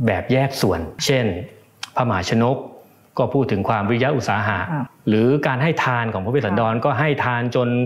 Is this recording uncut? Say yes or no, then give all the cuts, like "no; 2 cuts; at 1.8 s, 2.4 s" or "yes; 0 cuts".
no; 2 cuts; at 1.0 s, 4.8 s